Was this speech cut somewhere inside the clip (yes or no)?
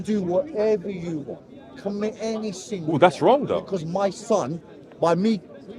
no